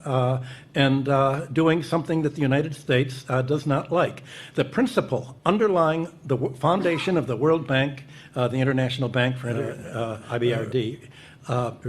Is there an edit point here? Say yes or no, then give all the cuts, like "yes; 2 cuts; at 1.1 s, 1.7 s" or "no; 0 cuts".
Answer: yes; 1 cut; at 10.2 s